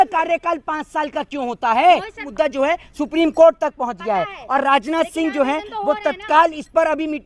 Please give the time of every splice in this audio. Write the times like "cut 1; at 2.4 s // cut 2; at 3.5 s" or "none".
cut 1; at 2.2 s